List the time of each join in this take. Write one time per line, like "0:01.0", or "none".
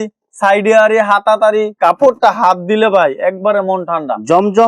0:01.7